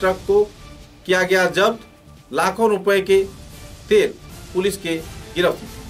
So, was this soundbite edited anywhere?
no; 0 cuts

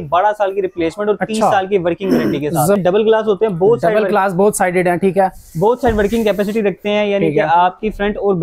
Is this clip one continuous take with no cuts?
no; 1 cut; at 2.8 s

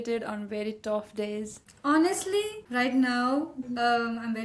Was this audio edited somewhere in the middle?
no; 0 cuts

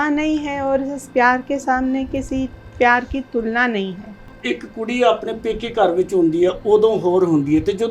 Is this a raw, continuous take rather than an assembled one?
no; 1 cut; at 4.4 s

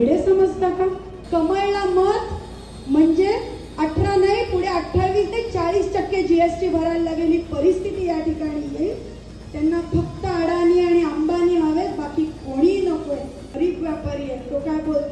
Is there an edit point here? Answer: yes; 2 cuts; at 1.1 s, 13.4 s

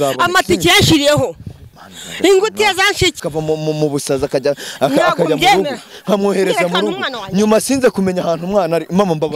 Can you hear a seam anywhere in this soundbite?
yes; 1 cut; at 3.2 s

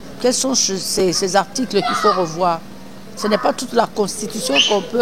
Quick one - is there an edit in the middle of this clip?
no; 0 cuts

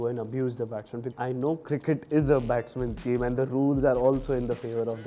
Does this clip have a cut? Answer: yes; 1 cut; at 1.1 s

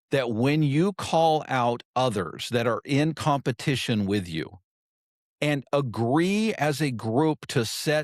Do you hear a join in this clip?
no; 0 cuts

